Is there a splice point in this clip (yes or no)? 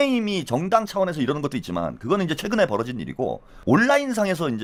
no